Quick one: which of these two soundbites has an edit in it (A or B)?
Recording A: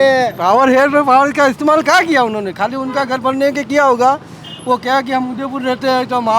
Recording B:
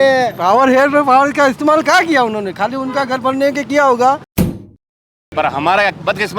B